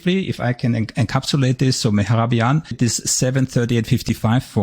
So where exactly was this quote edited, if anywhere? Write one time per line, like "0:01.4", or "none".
0:02.8